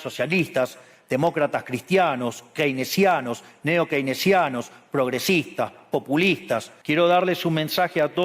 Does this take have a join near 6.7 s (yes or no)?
yes